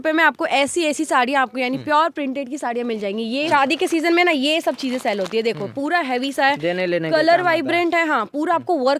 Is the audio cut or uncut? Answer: cut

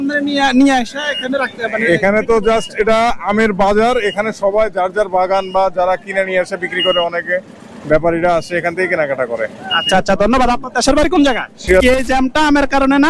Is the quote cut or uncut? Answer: cut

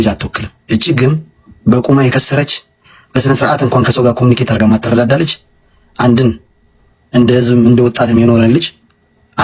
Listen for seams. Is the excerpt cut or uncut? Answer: uncut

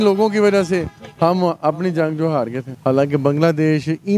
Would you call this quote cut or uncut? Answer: cut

